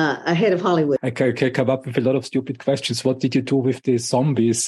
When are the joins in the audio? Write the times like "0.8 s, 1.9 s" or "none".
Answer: 1.0 s